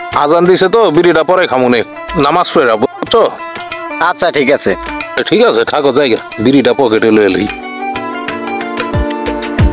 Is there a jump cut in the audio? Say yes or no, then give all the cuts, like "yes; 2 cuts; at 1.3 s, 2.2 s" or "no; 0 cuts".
no; 0 cuts